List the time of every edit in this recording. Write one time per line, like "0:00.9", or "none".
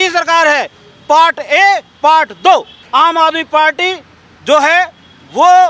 0:02.8

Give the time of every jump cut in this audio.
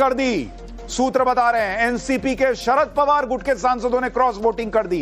0:03.4

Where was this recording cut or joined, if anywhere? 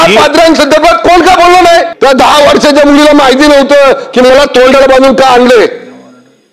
0:01.9

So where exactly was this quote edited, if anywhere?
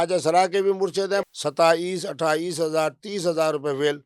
0:01.2

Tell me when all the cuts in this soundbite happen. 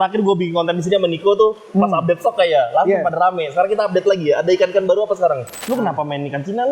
0:05.5

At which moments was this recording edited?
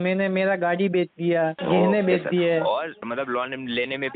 0:01.6
0:03.0

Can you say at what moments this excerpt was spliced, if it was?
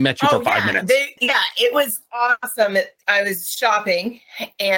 0:01.2
0:02.5

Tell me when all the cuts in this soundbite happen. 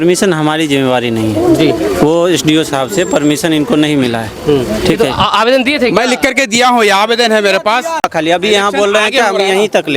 0:08.1

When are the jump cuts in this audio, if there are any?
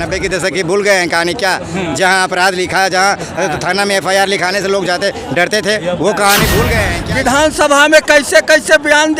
0:07.4

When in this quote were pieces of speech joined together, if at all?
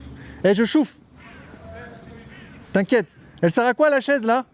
0:03.2

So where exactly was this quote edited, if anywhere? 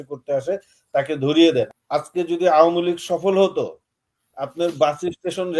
0:01.7

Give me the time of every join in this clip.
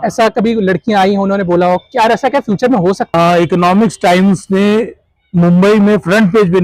0:03.1

